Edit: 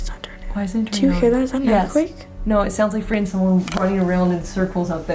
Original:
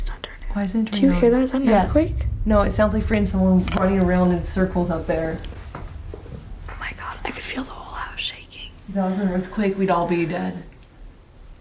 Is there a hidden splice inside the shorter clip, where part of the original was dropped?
no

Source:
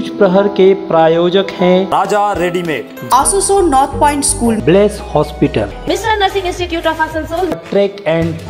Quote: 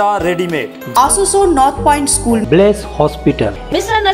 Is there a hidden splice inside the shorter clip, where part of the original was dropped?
no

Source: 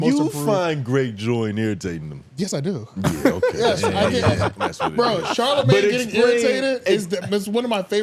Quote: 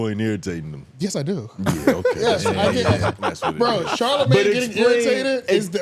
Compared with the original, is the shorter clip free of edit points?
yes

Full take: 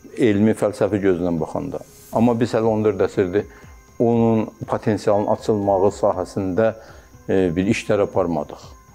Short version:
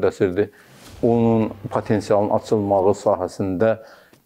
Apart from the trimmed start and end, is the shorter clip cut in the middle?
no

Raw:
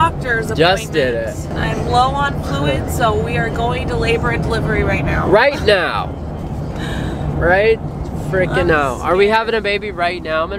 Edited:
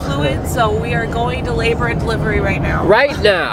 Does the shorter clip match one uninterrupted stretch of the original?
yes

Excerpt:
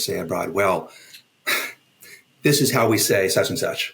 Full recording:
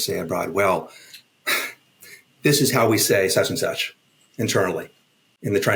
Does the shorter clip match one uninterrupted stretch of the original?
yes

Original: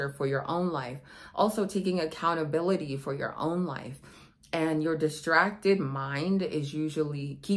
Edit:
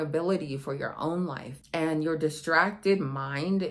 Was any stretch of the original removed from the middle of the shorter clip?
yes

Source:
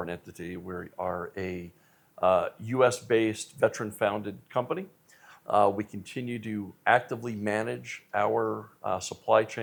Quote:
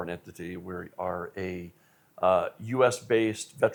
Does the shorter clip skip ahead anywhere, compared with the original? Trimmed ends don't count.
no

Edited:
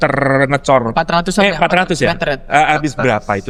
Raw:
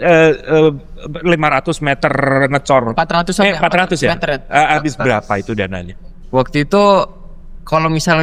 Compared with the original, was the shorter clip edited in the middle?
no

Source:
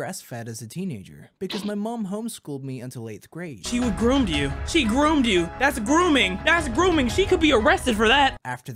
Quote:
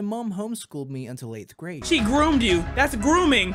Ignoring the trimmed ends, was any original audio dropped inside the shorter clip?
yes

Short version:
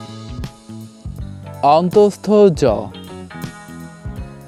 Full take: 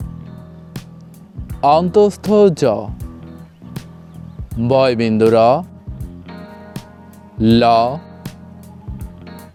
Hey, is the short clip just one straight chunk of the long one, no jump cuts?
yes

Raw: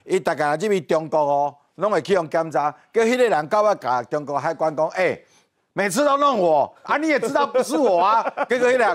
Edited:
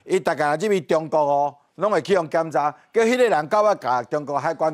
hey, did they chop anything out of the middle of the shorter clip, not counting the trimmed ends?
no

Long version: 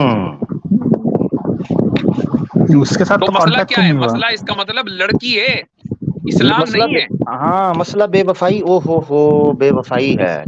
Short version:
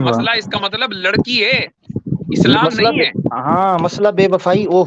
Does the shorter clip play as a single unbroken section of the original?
yes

